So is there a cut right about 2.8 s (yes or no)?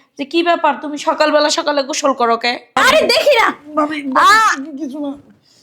yes